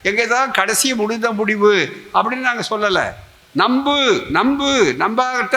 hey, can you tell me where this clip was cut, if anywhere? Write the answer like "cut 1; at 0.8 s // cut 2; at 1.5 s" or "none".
none